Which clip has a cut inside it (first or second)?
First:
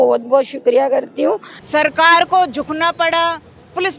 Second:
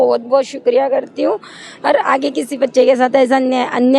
first